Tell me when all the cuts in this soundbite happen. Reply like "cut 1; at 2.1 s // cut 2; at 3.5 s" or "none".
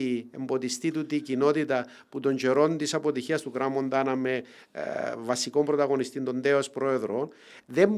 none